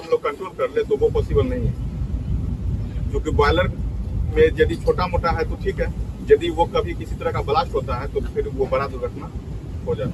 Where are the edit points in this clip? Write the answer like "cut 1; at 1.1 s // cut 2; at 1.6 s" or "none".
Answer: none